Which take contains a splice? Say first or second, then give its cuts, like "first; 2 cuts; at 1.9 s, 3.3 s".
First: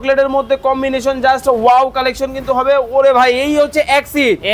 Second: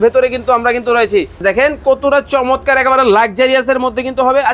second; 1 cut; at 1.4 s